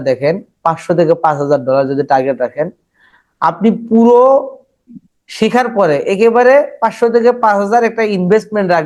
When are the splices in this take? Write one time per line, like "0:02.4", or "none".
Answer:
none